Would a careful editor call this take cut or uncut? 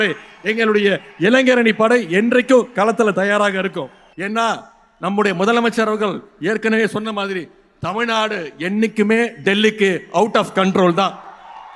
cut